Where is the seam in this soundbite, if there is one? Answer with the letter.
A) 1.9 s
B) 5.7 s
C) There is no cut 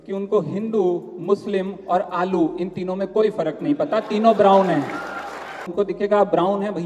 B